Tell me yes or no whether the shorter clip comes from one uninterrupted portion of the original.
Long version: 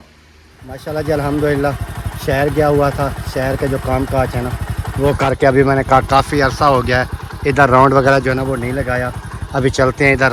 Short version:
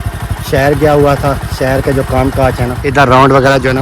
no